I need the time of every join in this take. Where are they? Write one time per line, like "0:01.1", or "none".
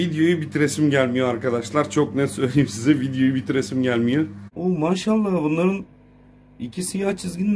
0:04.4